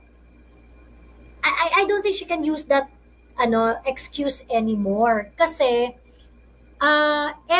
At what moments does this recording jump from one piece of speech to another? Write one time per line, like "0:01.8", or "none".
none